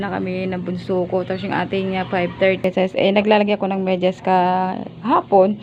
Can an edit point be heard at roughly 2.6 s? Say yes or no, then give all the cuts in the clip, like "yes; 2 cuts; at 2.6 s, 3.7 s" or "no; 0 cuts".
yes; 1 cut; at 2.6 s